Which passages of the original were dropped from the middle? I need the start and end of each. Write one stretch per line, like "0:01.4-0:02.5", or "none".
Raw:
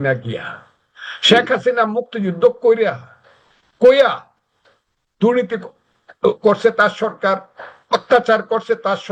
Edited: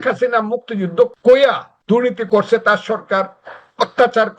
0:02.6-0:03.7
0:04.8-0:06.4